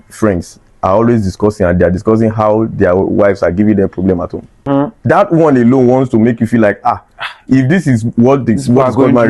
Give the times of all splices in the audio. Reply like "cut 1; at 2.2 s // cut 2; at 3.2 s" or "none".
cut 1; at 4.7 s

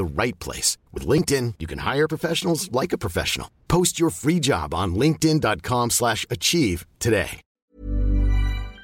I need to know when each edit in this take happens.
cut 1; at 7.4 s

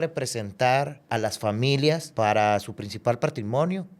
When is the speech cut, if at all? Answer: cut 1; at 1.0 s // cut 2; at 2.1 s

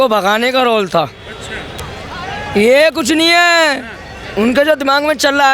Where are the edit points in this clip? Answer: cut 1; at 1.7 s

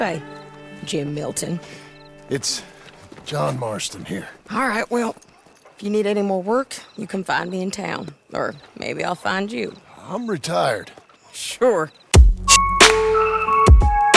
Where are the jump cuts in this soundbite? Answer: cut 1; at 12.0 s

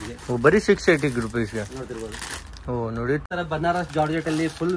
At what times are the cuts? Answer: cut 1; at 3.2 s

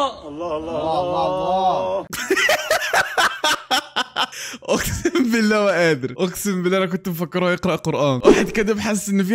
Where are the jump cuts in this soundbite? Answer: cut 1; at 6.1 s

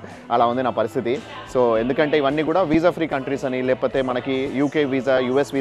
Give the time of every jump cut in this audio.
none

